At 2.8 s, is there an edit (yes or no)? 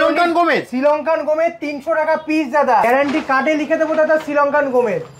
yes